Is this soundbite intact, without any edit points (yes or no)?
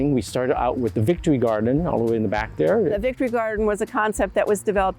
no